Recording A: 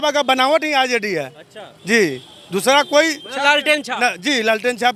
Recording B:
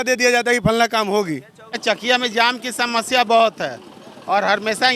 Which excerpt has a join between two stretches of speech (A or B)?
B